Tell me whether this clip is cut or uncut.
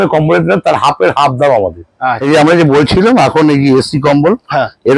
cut